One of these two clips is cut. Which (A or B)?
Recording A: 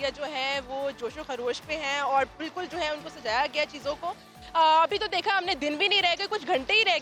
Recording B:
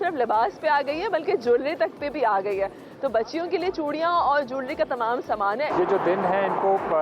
B